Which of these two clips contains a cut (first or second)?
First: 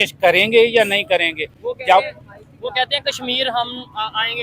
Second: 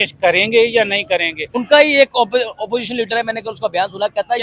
second